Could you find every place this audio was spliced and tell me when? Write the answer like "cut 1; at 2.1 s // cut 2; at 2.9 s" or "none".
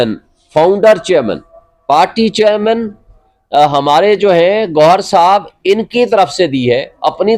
none